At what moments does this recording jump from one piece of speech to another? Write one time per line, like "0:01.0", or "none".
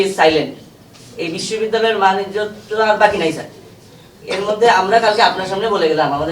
none